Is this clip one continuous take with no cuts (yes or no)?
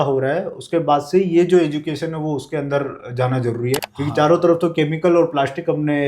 no